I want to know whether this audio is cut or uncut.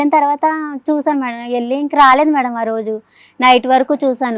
uncut